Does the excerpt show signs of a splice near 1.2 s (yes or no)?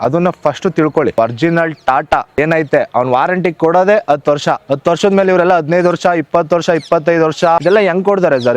yes